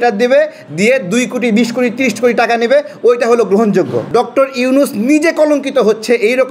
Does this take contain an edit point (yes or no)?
yes